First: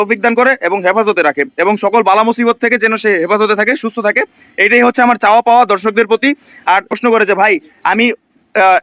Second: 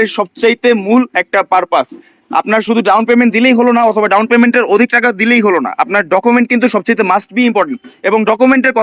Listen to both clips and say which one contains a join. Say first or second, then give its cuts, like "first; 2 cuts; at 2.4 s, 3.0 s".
first; 1 cut; at 6.9 s